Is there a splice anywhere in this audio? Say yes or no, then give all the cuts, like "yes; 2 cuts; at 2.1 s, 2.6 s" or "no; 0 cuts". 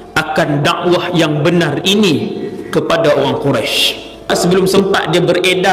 yes; 1 cut; at 4.3 s